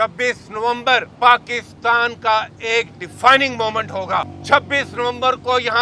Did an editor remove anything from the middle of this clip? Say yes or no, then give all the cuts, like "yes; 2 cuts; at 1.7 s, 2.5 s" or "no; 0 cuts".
yes; 2 cuts; at 1.1 s, 4.4 s